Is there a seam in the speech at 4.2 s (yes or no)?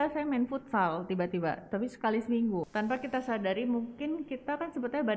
no